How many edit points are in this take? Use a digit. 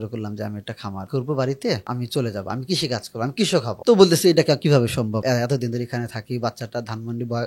4